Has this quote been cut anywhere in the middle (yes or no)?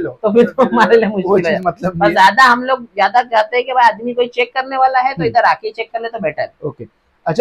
no